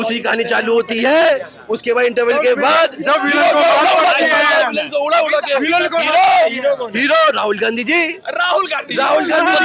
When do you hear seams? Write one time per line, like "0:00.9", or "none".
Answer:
none